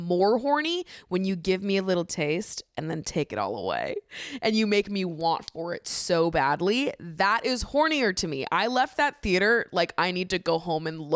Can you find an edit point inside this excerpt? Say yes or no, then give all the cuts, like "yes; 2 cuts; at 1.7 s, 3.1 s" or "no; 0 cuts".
no; 0 cuts